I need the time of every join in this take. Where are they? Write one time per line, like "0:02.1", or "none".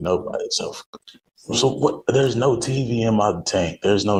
none

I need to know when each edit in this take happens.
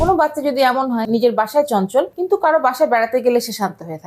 0:01.0
0:02.2

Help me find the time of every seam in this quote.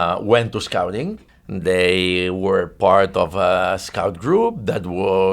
0:01.2

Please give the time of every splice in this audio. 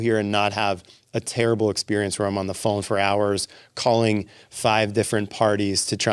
none

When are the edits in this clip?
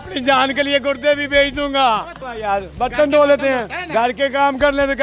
none

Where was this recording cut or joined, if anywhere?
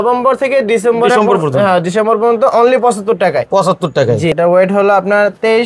0:04.3

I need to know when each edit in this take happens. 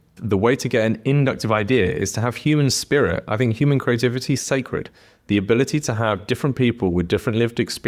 none

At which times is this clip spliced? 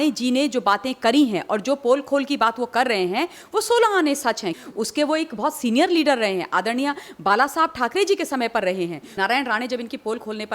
0:04.6
0:09.1

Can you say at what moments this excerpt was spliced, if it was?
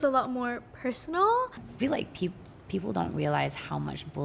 0:01.6

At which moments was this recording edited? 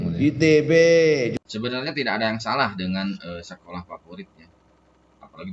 0:01.5

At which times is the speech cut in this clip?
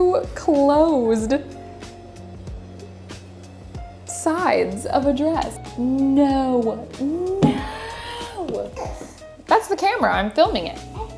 0:08.7

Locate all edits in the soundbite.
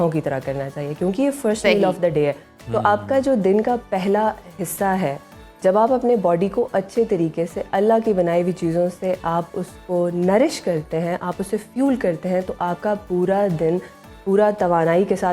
none

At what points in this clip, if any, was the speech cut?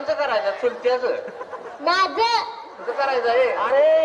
none

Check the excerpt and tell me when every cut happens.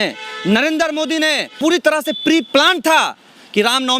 0:01.5

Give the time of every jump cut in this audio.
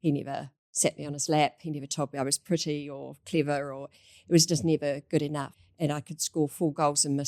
0:05.5

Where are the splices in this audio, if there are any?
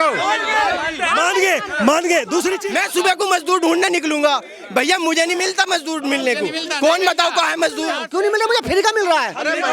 0:02.6
0:08.0

